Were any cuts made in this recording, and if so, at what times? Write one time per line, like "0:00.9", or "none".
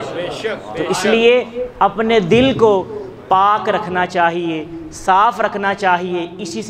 none

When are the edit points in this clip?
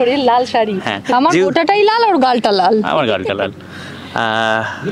none

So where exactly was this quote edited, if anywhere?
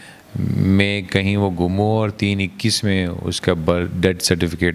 none

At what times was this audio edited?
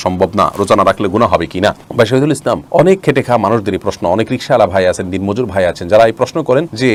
none

